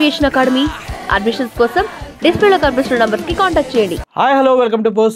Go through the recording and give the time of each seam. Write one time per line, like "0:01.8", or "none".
0:04.0